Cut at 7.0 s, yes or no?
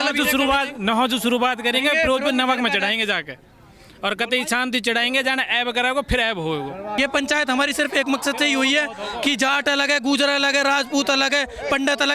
yes